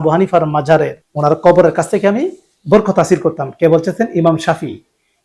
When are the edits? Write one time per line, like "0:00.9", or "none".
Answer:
0:01.0